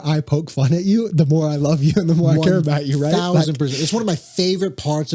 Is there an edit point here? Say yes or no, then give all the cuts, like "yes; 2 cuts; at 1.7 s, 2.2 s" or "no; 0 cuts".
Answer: no; 0 cuts